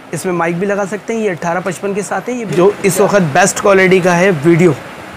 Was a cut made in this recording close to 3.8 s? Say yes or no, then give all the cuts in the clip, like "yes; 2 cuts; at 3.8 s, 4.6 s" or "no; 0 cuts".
no; 1 cut; at 2.4 s